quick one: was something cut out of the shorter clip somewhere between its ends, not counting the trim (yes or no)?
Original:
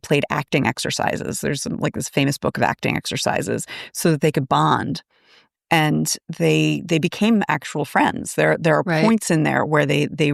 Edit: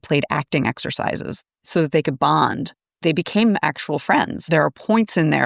yes